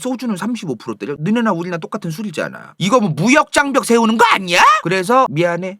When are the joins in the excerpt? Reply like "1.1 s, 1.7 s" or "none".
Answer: 2.7 s